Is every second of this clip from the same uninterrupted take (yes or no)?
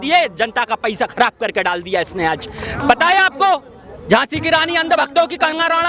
no